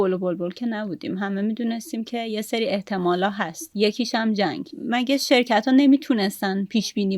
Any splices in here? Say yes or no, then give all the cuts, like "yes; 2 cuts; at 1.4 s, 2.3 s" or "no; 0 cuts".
yes; 1 cut; at 4.7 s